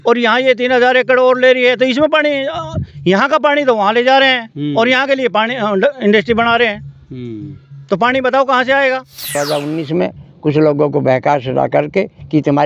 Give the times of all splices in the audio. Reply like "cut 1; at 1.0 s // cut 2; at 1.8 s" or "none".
cut 1; at 9.4 s